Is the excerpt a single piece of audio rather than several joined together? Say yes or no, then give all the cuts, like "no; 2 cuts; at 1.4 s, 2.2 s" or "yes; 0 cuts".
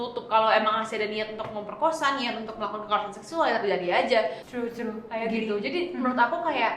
no; 1 cut; at 4.4 s